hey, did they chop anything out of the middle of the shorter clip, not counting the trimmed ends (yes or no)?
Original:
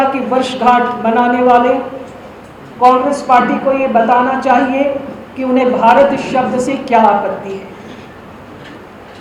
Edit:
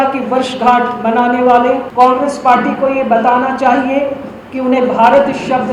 yes